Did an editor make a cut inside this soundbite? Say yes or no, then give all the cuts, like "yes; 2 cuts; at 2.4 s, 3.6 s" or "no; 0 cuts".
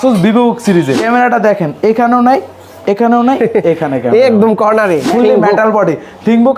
yes; 2 cuts; at 1.0 s, 5.1 s